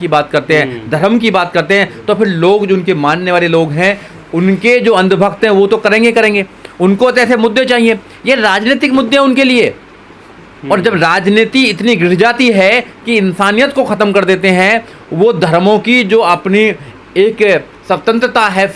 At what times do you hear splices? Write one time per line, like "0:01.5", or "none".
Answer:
none